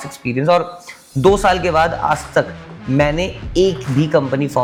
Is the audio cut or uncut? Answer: uncut